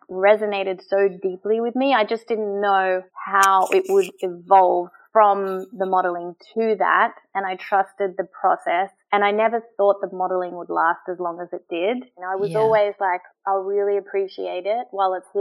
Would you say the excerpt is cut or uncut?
cut